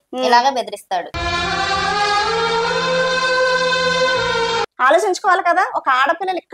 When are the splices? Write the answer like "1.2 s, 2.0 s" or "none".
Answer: 4.6 s